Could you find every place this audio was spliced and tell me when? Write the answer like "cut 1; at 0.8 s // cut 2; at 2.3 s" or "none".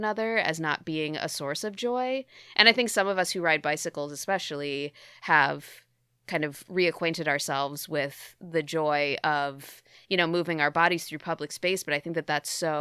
none

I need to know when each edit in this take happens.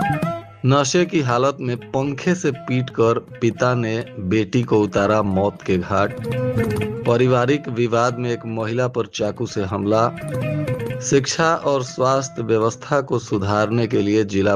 none

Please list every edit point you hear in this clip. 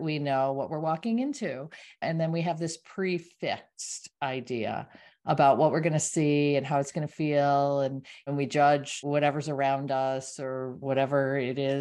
cut 1; at 2.0 s // cut 2; at 8.3 s // cut 3; at 9.0 s // cut 4; at 10.8 s

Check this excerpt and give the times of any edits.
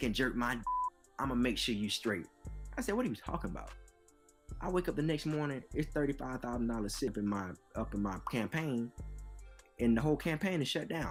none

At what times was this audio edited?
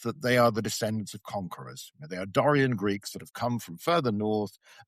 none

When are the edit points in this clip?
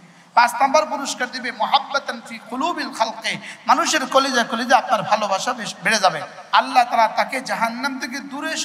cut 1; at 6.3 s

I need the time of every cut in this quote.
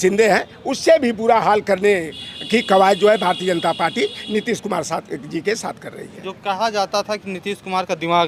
none

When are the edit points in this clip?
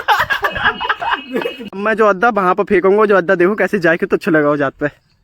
cut 1; at 1.7 s

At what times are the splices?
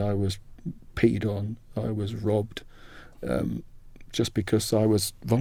none

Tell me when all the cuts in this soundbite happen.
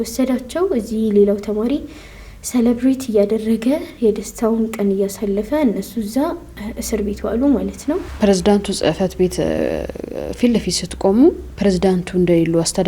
cut 1; at 8.1 s

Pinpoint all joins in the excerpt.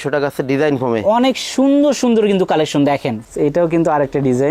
cut 1; at 3.2 s

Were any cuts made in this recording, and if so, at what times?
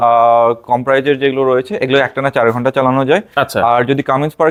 none

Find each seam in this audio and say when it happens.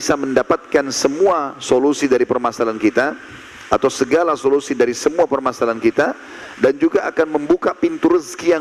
none

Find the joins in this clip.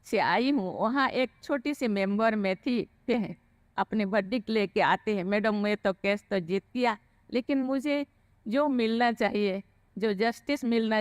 cut 1; at 3.1 s

